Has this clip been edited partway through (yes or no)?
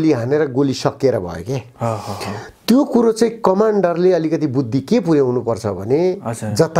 no